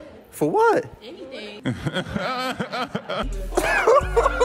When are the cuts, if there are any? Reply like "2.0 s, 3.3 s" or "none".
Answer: 1.5 s, 3.4 s